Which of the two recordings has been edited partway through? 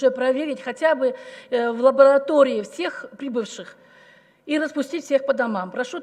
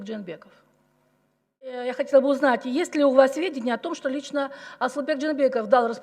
second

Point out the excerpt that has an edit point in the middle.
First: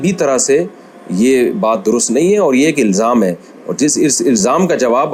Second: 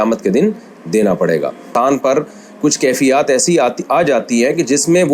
second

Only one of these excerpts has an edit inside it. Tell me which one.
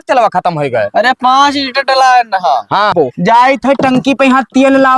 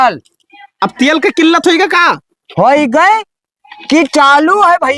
first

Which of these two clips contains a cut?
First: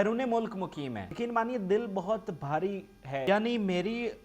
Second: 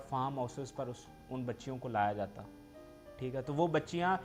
first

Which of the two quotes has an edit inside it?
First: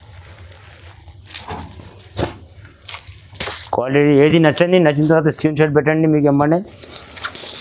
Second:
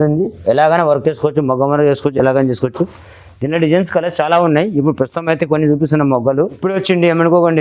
second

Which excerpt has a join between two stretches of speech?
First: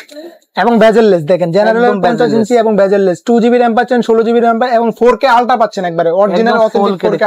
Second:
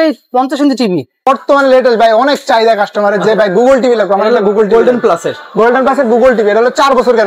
second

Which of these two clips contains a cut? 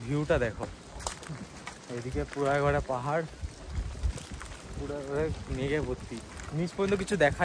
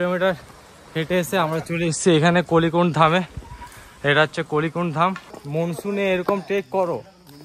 second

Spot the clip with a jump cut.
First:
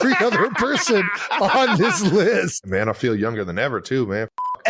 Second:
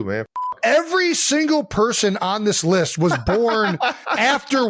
first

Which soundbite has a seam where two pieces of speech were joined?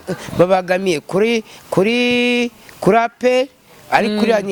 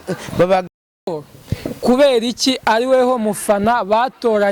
second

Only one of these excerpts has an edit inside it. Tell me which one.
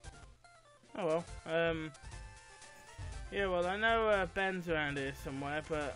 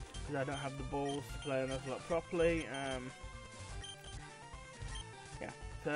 first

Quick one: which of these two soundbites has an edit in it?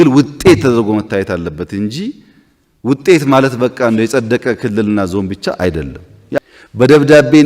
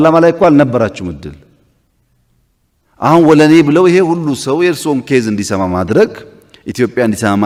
first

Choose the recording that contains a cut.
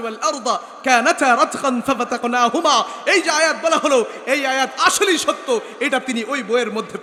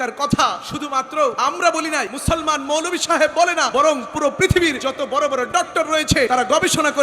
second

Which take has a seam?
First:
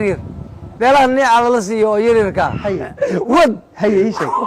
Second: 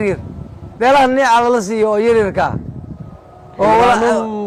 first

